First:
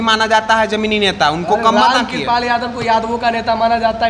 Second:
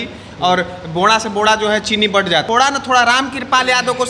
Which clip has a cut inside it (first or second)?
second